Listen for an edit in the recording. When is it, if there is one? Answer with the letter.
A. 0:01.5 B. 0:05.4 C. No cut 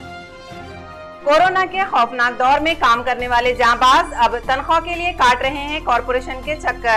C